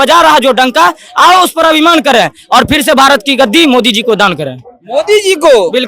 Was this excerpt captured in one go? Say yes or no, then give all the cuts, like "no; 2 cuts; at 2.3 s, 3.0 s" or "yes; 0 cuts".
yes; 0 cuts